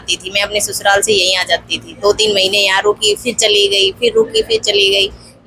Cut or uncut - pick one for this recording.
uncut